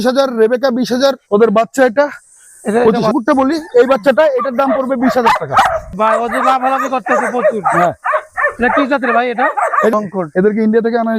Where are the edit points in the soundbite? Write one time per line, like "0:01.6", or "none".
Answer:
0:03.1
0:05.9
0:09.9